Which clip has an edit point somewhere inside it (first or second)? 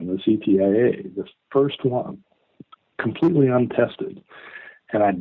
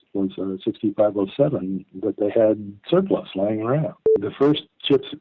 second